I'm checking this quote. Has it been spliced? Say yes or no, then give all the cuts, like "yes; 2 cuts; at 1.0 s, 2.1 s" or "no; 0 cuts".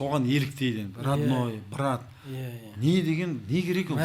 no; 0 cuts